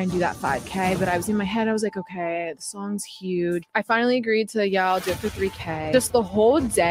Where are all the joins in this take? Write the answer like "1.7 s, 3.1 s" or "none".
3.7 s